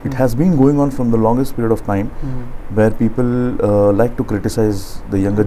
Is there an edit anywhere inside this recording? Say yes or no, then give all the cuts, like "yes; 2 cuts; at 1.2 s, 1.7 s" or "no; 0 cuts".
no; 0 cuts